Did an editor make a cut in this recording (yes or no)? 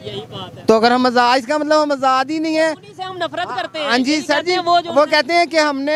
no